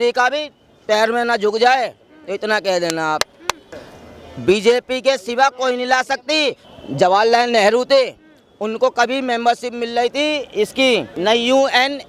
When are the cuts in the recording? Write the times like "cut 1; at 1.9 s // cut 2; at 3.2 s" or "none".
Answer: cut 1; at 3.6 s // cut 2; at 6.6 s